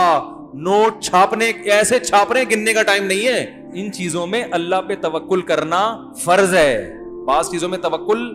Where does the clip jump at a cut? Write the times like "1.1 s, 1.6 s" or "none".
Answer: 3.6 s

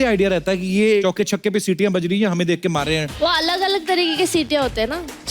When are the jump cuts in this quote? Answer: 1.0 s, 3.2 s

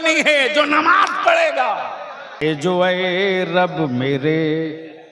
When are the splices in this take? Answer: 2.2 s

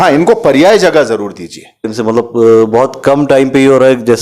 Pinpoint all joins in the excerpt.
1.9 s

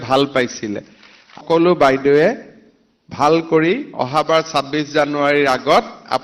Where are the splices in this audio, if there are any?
1.3 s

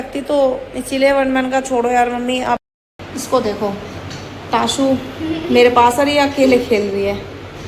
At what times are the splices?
2.6 s

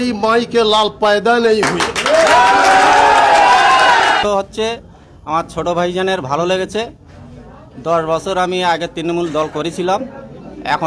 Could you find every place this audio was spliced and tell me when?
4.2 s

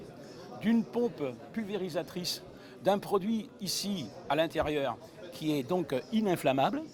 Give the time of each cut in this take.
none

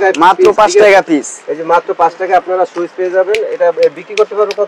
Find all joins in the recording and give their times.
none

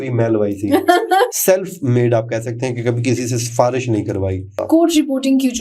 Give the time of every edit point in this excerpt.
1.4 s, 4.5 s

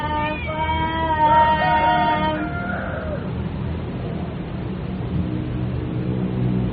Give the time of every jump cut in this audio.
3.4 s

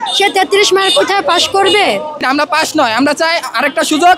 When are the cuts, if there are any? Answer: 2.2 s

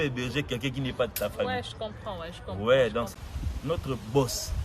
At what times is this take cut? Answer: 3.1 s

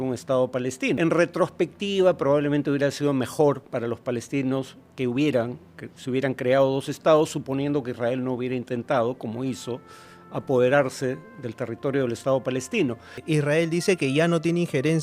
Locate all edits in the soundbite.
1.0 s, 13.2 s

